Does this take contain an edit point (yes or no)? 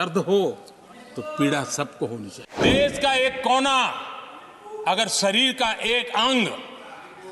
yes